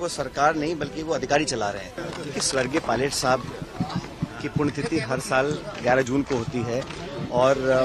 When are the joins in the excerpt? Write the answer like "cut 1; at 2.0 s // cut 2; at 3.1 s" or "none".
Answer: cut 1; at 2.1 s